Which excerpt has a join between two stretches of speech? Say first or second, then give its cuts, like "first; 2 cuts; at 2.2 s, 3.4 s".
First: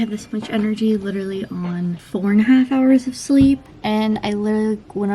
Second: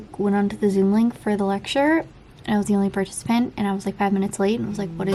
first; 2 cuts; at 2.0 s, 3.7 s